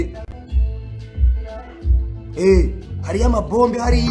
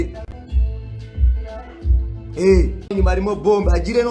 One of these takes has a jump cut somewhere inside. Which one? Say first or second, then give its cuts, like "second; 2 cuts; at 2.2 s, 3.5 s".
second; 1 cut; at 2.9 s